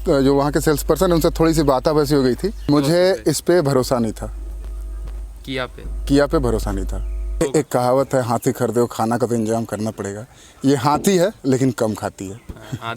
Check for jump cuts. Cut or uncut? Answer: cut